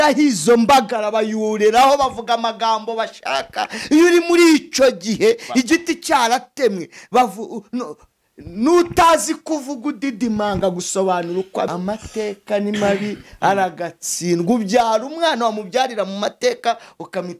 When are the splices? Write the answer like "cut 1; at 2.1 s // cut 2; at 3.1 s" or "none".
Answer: cut 1; at 11.7 s